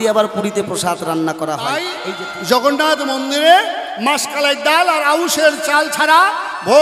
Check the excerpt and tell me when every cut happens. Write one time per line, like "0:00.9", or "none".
0:01.9

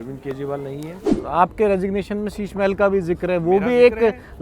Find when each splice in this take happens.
0:01.1

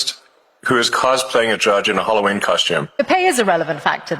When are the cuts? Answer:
0:03.0

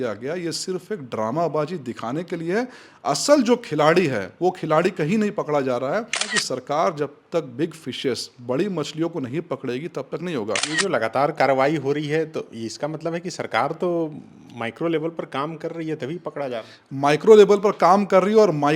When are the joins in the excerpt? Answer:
0:06.3
0:10.6

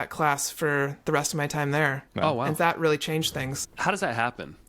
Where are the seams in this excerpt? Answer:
0:02.0
0:03.6

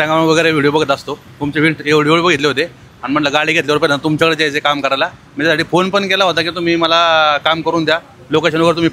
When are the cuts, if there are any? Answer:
none

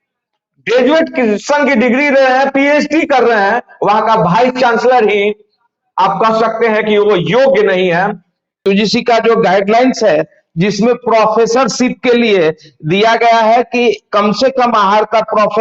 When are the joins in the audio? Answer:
0:08.5

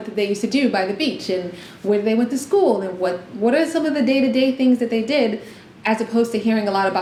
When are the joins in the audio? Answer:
none

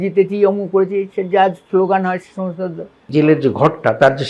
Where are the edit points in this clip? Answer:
0:03.1

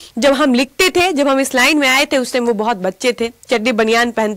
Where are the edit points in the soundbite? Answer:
none

